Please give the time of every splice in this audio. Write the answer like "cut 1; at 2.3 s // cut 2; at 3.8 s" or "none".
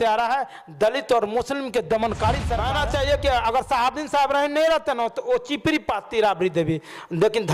cut 1; at 2.6 s

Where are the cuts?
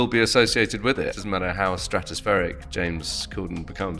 cut 1; at 1.1 s

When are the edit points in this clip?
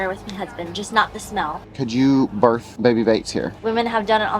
cut 1; at 1.7 s // cut 2; at 2.7 s // cut 3; at 3.6 s

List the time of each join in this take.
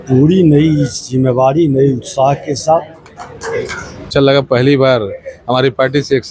cut 1; at 3.4 s

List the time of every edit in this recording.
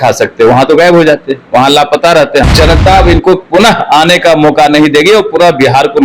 cut 1; at 2.4 s

